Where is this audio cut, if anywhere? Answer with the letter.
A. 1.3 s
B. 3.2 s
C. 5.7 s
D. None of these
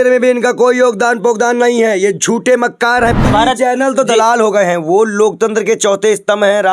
B